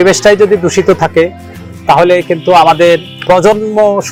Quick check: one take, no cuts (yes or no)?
yes